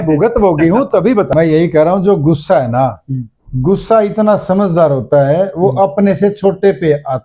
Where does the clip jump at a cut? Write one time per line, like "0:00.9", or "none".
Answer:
0:01.3